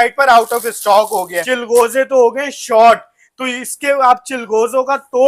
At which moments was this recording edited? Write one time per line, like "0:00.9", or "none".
0:01.4